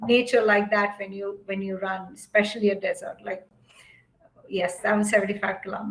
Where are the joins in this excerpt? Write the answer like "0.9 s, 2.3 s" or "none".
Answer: 3.5 s